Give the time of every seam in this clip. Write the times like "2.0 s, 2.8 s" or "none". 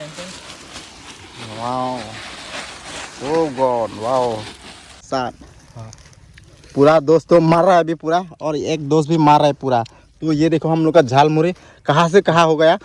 5.1 s